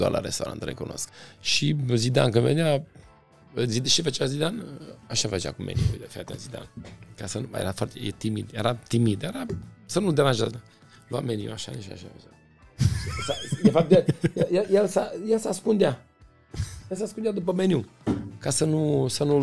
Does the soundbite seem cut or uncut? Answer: cut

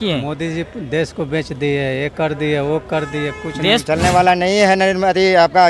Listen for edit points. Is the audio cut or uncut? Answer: cut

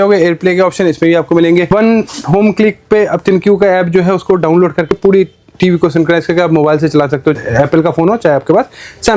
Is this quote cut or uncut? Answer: uncut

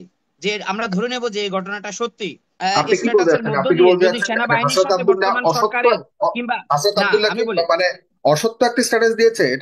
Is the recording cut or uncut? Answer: cut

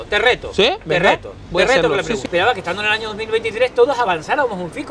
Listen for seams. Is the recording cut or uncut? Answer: cut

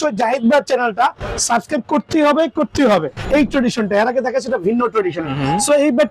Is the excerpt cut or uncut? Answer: cut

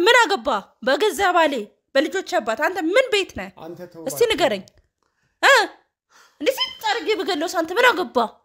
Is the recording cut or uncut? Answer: uncut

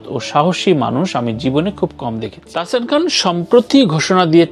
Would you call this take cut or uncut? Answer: cut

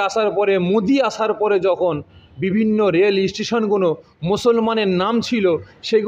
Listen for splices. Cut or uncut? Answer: uncut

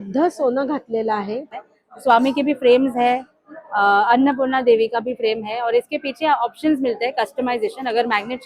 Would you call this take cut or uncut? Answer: cut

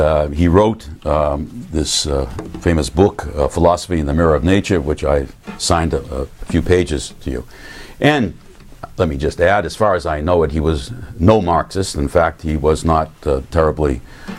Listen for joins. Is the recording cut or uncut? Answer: cut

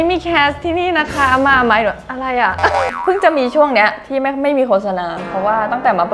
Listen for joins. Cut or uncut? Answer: cut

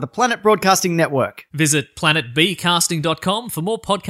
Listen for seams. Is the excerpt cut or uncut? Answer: uncut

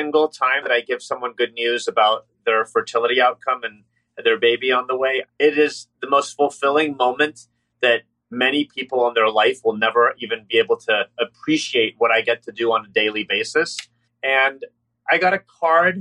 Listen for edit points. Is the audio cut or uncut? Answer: cut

